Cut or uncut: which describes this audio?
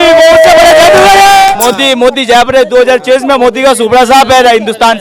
cut